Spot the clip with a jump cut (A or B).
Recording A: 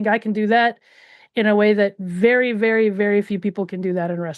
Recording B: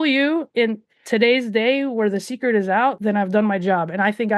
B